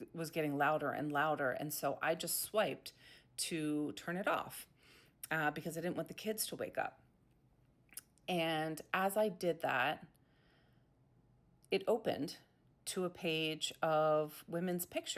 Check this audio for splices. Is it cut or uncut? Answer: uncut